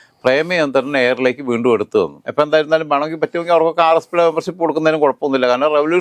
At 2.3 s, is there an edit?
no; 0 cuts

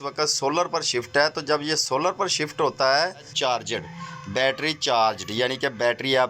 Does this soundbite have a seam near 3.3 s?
yes; 1 cut; at 3.3 s

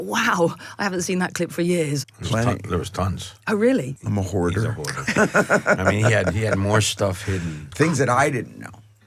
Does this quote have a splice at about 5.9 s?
no; 3 cuts; at 2.0 s, 4.0 s, 7.6 s

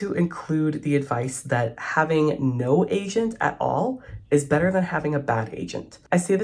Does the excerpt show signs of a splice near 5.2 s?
no; 0 cuts

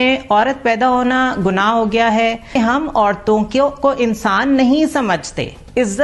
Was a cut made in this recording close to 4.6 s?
no; 1 cut; at 2.5 s

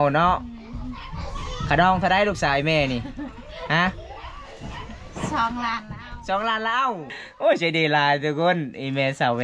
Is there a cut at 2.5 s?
no; 1 cut; at 7.1 s

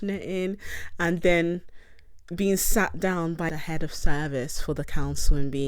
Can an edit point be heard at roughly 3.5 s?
yes; 1 cut; at 3.5 s

